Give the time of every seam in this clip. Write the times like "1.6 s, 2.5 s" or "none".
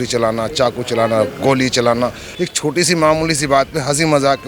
2.2 s